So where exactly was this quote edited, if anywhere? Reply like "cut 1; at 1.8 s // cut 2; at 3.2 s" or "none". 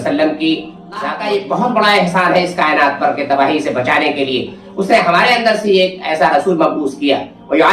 cut 1; at 1.2 s